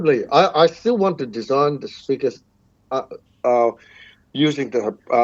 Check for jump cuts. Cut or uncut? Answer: uncut